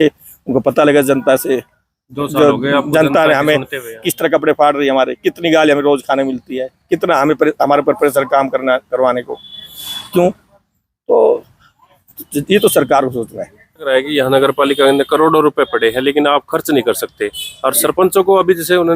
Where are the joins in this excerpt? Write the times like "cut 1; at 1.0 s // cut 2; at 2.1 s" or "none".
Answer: cut 1; at 13.8 s